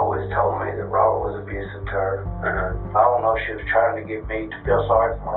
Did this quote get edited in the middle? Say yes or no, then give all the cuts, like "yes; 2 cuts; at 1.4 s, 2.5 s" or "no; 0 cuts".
no; 0 cuts